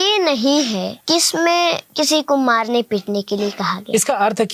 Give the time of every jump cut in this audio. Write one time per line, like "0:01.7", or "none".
0:00.9
0:01.8